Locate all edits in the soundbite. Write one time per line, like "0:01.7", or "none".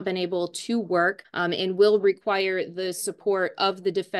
0:01.3